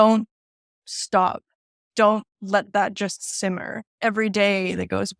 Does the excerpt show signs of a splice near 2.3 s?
no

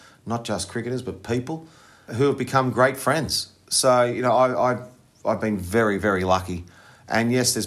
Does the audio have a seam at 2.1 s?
yes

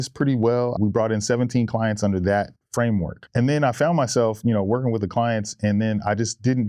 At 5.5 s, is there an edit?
no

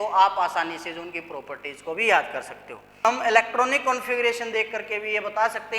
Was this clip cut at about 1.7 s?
no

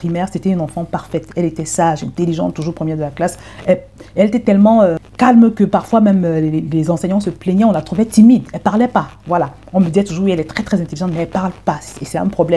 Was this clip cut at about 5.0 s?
yes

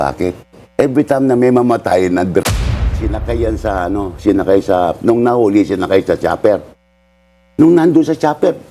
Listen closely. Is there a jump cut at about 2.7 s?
yes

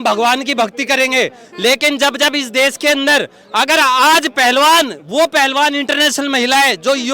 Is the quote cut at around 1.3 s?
no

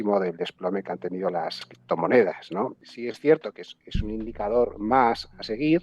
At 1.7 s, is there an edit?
yes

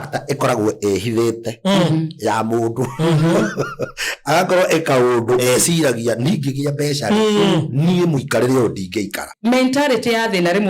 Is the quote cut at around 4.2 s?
no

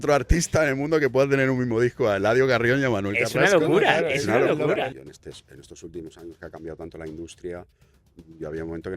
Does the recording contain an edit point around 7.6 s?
no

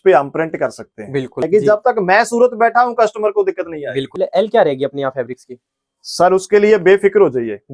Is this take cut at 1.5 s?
yes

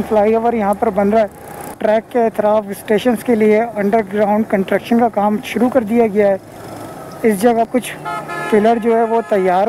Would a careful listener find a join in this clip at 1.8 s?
yes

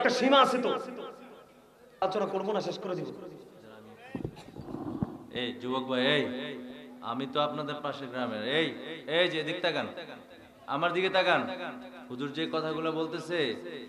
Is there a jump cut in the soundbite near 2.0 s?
yes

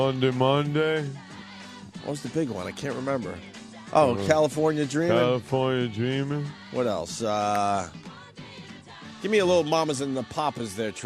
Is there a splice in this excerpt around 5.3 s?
yes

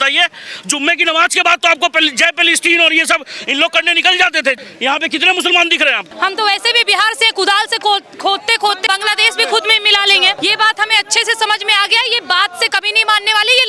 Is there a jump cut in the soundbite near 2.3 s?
no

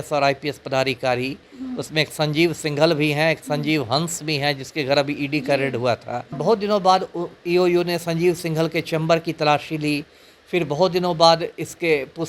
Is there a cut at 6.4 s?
yes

